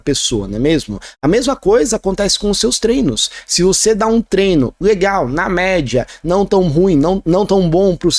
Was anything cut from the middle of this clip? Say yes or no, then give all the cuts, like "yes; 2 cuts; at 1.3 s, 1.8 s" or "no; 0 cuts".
no; 0 cuts